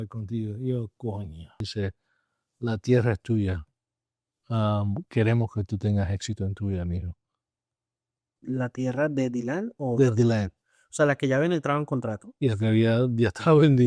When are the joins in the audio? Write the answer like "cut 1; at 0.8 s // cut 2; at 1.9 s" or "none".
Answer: cut 1; at 1.7 s